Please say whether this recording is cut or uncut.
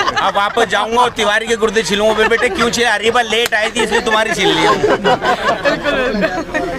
uncut